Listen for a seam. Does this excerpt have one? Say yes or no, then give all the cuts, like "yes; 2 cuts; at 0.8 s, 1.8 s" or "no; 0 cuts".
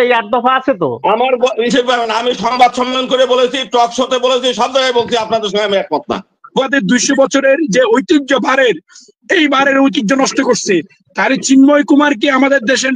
yes; 1 cut; at 6.7 s